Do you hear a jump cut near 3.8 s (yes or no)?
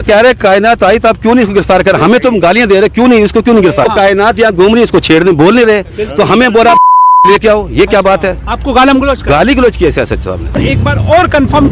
yes